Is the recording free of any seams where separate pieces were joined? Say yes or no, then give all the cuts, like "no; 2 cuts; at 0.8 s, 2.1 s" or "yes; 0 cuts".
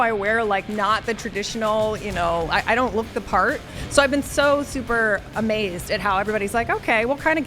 no; 1 cut; at 3.8 s